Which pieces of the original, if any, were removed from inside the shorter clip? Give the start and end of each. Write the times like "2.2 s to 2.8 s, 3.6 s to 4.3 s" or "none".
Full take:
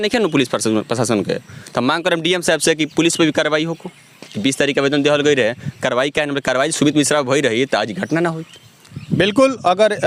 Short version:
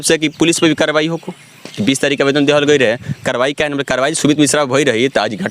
none